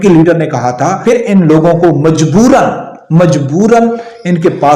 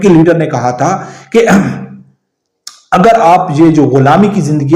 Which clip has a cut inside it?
first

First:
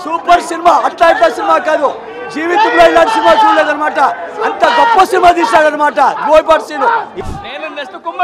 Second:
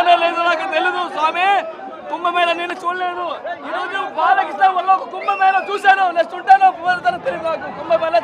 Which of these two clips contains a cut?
first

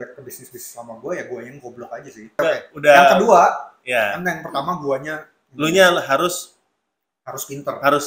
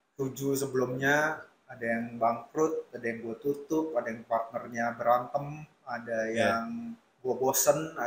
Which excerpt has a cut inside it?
first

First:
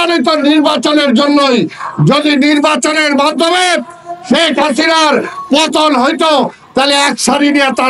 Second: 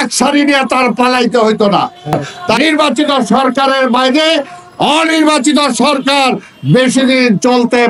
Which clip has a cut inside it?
second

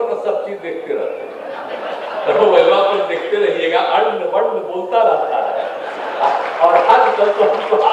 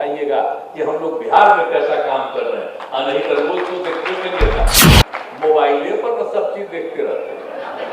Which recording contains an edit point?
second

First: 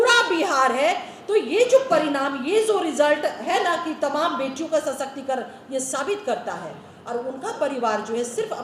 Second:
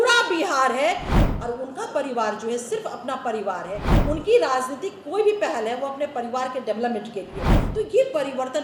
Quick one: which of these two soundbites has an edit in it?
second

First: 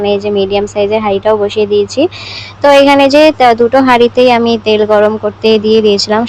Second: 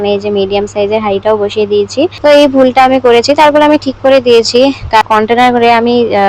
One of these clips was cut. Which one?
second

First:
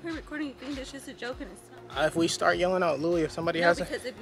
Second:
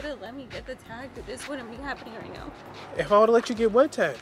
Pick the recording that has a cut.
first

